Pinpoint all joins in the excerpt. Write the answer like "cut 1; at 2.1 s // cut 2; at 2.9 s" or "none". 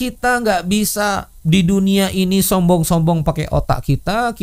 none